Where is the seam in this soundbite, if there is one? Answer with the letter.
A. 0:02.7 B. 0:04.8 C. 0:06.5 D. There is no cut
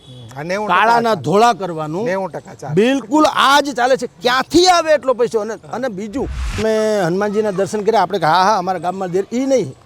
C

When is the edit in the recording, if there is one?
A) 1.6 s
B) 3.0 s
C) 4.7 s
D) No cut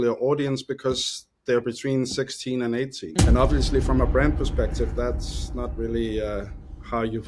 B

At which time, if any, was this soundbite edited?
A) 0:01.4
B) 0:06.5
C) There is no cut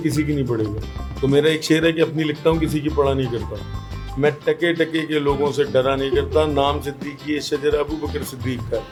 C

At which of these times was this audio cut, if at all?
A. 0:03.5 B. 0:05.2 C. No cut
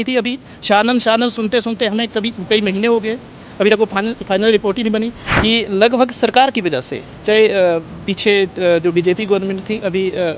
B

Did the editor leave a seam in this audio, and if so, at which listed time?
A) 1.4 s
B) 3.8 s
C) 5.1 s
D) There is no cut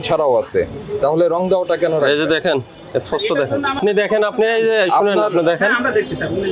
B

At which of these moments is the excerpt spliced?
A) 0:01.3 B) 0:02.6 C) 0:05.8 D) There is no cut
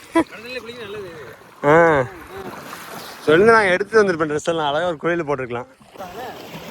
C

